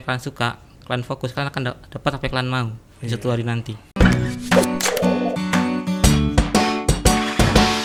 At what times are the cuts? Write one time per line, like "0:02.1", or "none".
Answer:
none